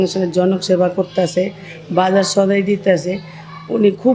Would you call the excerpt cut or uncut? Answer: uncut